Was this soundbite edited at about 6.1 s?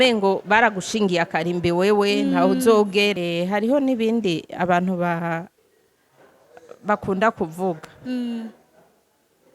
no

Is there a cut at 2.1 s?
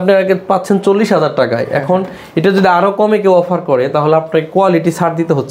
no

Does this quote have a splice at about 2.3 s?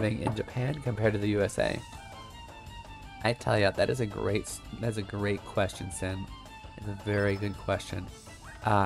no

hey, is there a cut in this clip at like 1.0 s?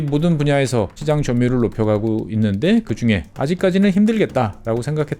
yes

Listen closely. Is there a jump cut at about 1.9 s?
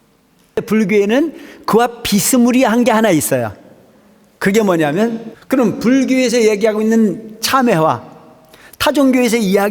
no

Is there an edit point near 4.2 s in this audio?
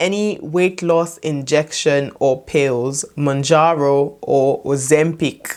no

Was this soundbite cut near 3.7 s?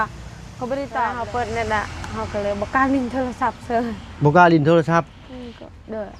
no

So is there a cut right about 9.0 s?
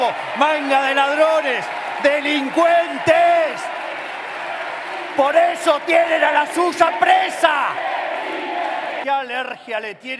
yes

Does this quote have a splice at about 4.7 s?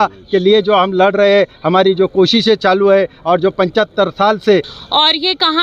yes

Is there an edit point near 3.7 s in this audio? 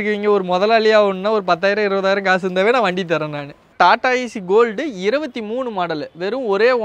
yes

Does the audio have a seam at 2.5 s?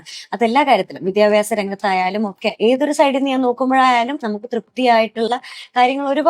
yes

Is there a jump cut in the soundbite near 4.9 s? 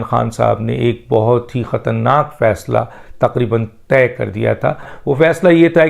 yes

